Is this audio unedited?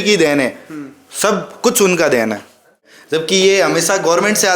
no; 1 cut; at 2.8 s

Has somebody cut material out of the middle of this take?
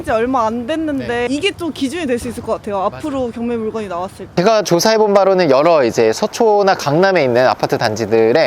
yes; 2 cuts; at 1.3 s, 4.3 s

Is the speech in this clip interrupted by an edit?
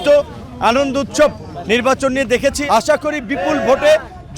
yes; 1 cut; at 2.6 s

